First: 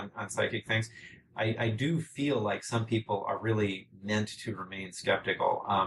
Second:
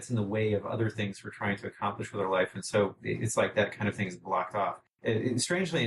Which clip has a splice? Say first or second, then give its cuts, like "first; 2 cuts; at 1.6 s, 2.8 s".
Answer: second; 1 cut; at 4.9 s